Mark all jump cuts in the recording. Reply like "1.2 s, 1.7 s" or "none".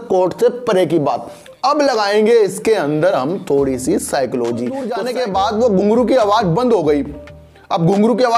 4.9 s

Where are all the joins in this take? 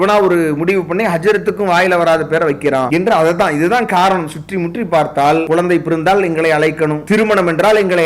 2.9 s, 5.5 s, 7.0 s

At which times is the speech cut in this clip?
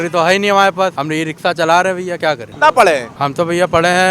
1.0 s, 2.5 s, 3.2 s

